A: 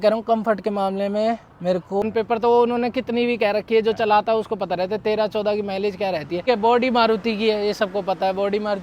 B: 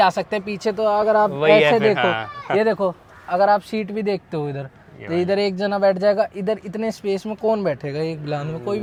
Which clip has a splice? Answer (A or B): A